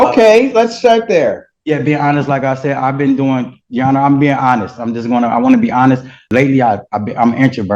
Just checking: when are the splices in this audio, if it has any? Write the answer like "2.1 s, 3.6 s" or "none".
6.2 s